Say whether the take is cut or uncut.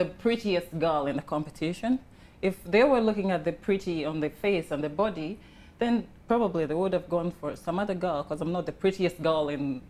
uncut